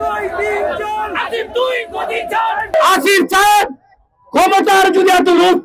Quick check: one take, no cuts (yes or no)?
no